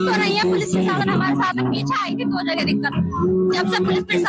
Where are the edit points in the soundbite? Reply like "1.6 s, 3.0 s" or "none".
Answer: 1.6 s

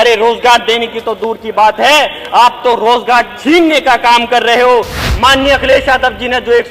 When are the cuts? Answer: 5.0 s

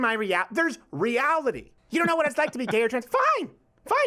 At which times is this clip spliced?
1.7 s

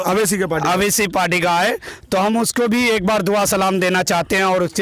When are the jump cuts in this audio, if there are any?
none

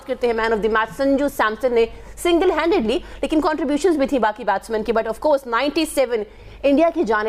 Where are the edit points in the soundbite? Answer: none

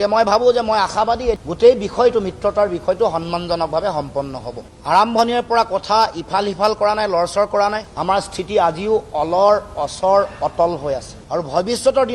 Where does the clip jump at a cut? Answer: 1.4 s, 4.7 s

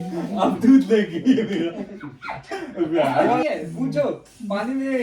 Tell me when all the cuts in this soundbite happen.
3.4 s

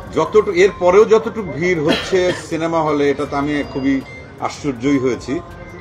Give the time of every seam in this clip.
none

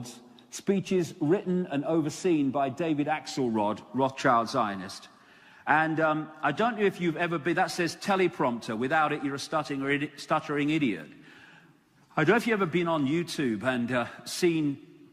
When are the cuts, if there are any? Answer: 13.0 s

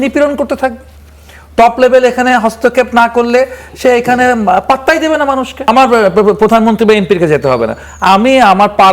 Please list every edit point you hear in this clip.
5.7 s

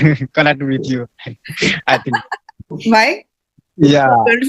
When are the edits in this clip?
2.7 s

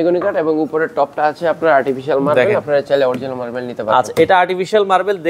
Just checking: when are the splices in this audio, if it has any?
none

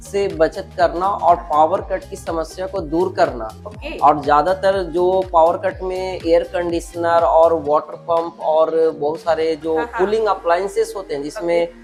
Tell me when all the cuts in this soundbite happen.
none

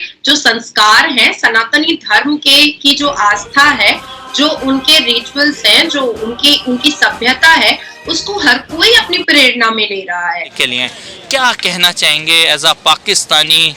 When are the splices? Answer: 10.5 s

